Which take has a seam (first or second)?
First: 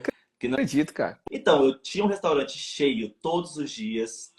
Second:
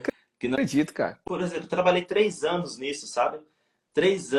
first